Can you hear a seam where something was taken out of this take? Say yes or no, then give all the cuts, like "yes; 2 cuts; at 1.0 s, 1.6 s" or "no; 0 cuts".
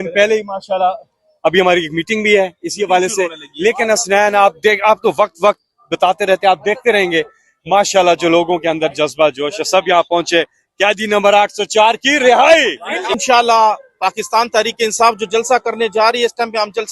yes; 1 cut; at 13.1 s